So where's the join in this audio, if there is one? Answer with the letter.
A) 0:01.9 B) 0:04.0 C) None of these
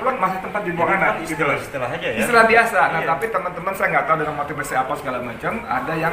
C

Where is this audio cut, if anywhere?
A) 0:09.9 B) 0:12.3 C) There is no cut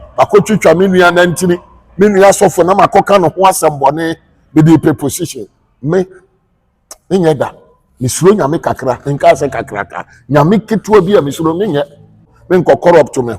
B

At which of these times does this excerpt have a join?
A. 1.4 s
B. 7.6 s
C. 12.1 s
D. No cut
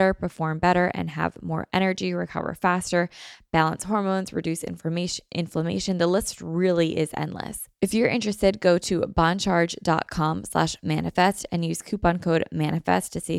B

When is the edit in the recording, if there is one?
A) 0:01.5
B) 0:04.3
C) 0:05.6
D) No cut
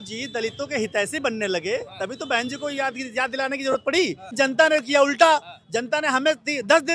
B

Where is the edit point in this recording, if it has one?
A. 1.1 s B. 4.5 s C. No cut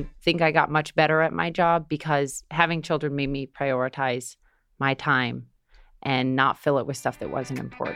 C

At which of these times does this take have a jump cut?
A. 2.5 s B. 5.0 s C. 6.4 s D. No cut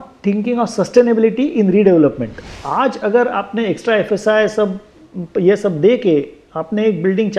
A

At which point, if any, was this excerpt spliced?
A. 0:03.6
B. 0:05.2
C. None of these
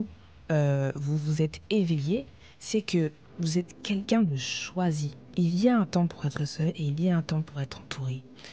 B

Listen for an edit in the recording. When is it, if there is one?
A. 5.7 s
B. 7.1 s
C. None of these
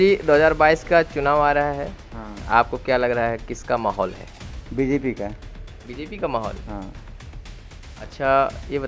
C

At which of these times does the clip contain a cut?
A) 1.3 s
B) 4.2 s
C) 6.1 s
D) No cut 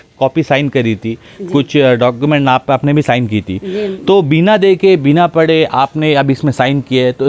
D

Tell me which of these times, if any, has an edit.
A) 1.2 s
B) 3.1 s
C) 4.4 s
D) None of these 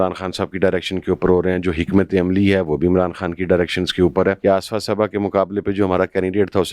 C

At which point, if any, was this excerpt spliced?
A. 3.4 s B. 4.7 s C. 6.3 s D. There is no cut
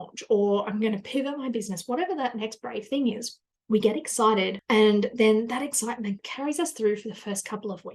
C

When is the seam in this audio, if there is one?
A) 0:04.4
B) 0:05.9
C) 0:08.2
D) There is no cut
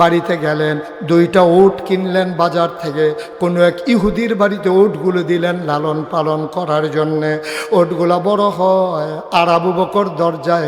D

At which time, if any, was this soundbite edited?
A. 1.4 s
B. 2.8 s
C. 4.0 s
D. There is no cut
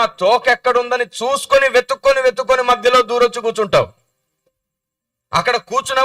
D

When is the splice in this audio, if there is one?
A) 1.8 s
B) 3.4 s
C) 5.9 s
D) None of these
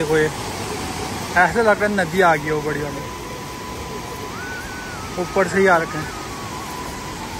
D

